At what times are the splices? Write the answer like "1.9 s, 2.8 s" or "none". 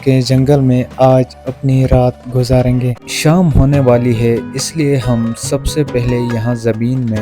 2.9 s